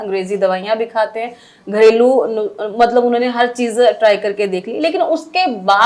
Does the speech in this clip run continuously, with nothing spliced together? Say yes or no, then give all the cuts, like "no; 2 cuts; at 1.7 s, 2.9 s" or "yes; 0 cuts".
yes; 0 cuts